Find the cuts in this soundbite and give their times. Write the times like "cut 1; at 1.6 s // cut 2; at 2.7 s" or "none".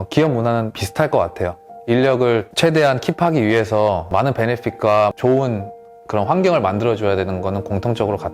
cut 1; at 0.8 s // cut 2; at 2.5 s // cut 3; at 4.1 s